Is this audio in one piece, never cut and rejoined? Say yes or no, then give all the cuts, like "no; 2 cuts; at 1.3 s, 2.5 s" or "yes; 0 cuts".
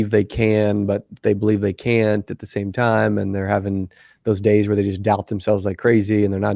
yes; 0 cuts